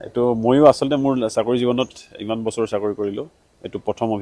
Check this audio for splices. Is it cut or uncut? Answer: uncut